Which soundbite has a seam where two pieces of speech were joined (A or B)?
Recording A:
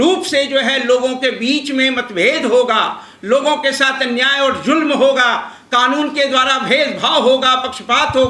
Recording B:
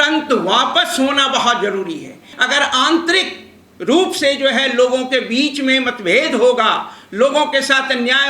B